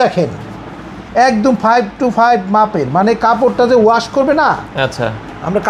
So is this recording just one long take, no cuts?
yes; 0 cuts

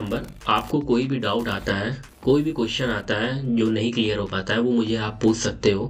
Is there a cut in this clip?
no; 0 cuts

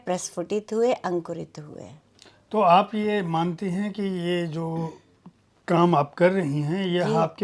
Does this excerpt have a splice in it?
no; 0 cuts

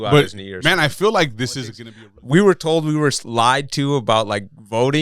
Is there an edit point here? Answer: yes; 1 cut; at 1.8 s

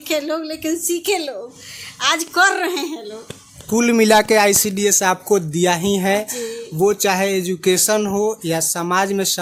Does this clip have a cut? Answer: no; 0 cuts

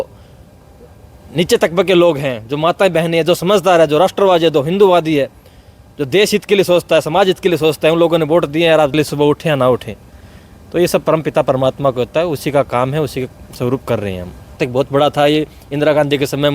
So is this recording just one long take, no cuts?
no; 2 cuts; at 8.9 s, 14.6 s

